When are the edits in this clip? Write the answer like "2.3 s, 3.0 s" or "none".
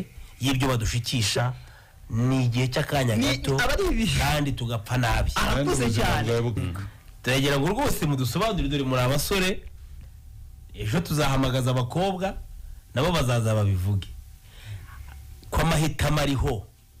6.6 s